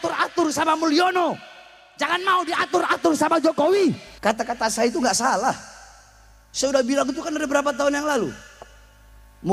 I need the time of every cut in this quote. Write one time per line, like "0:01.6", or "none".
0:04.1